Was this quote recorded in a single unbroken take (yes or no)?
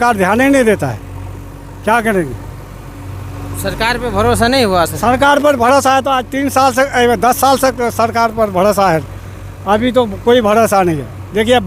yes